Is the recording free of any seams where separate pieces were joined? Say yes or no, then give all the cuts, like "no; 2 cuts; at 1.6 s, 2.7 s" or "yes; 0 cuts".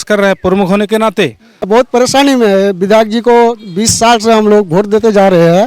no; 1 cut; at 1.7 s